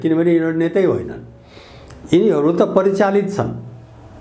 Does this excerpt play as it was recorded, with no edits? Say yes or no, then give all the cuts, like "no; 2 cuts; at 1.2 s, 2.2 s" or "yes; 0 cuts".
yes; 0 cuts